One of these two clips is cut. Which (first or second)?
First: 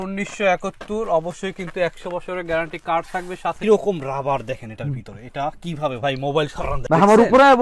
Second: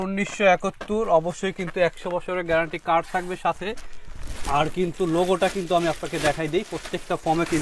first